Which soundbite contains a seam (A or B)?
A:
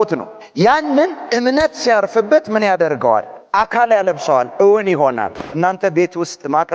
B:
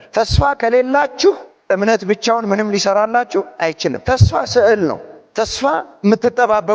A